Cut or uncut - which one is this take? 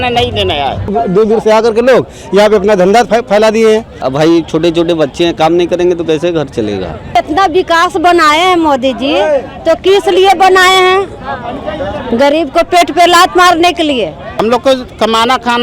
cut